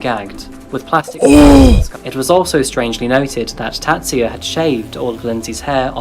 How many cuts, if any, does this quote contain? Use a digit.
1